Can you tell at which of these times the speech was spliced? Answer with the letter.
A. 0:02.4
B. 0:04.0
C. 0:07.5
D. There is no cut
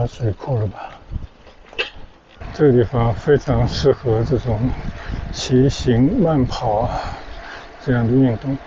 A